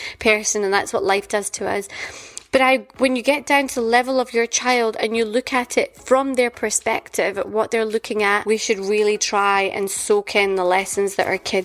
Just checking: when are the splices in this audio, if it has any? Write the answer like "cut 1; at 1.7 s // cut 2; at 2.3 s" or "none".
cut 1; at 8.4 s